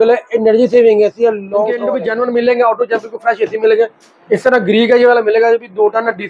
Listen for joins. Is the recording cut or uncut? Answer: cut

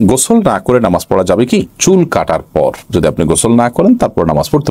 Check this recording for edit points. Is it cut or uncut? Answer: uncut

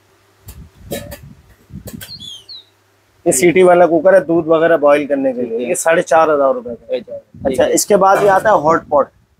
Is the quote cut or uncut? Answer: uncut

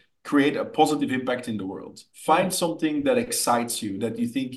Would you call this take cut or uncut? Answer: cut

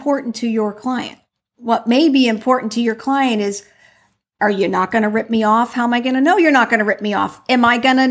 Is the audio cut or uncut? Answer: uncut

